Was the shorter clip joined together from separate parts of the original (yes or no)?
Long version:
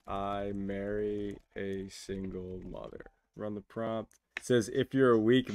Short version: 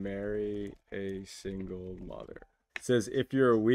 yes